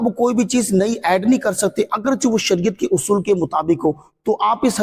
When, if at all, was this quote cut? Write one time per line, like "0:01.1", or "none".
none